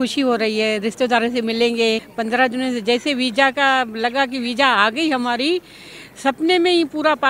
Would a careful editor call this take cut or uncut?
cut